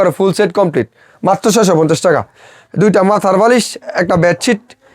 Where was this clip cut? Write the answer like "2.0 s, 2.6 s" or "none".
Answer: none